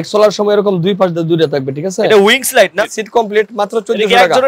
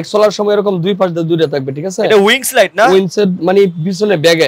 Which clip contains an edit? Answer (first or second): first